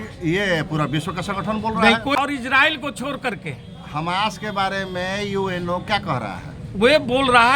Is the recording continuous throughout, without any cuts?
no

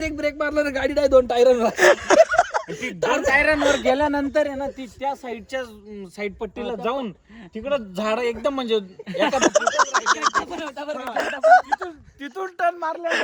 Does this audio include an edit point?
no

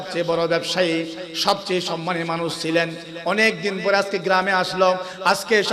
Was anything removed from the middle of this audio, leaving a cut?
no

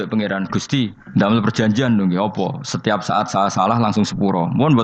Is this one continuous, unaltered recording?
no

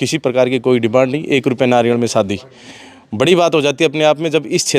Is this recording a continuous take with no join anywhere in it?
yes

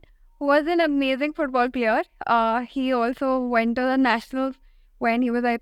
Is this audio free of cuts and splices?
yes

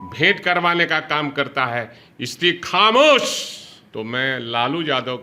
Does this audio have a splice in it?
yes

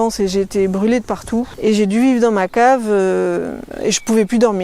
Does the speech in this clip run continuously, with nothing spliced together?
no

